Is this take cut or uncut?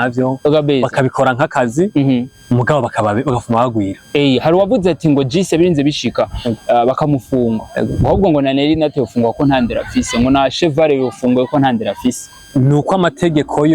cut